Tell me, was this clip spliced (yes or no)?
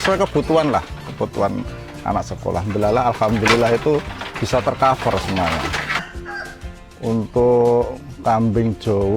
yes